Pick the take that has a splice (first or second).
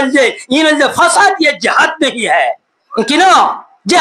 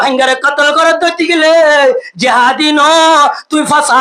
first